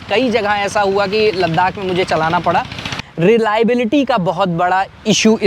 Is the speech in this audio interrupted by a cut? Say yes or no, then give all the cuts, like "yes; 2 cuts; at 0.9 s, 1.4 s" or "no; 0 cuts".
yes; 1 cut; at 3.0 s